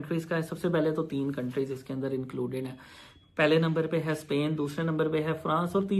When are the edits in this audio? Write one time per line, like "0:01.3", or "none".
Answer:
none